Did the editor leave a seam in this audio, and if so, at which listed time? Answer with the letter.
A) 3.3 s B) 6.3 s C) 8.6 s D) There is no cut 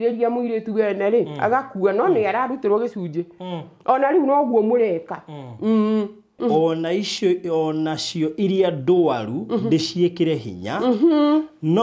B